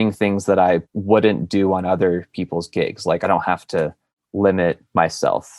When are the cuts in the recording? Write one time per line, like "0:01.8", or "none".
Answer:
0:00.9